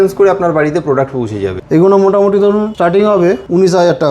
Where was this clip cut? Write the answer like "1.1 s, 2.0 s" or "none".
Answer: 1.6 s, 3.2 s